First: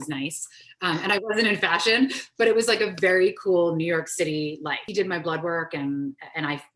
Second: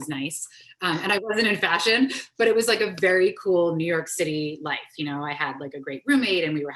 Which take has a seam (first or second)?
first